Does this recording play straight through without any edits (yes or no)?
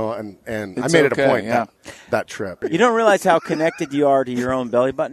no